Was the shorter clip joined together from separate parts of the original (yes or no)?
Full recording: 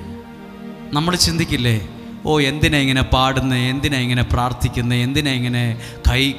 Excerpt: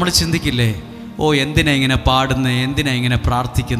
no